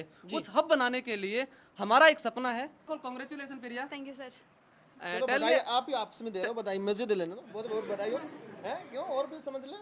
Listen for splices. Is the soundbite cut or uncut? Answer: cut